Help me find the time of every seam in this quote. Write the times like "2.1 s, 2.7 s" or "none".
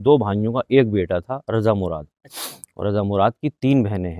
none